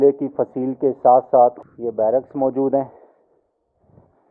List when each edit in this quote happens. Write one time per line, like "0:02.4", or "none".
none